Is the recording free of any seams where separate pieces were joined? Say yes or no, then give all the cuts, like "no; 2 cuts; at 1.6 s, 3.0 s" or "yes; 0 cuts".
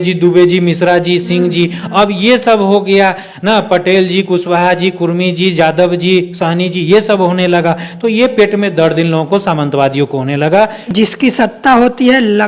yes; 0 cuts